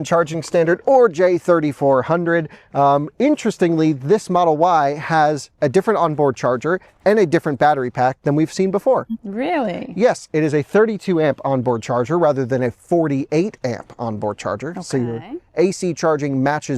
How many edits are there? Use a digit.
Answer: 0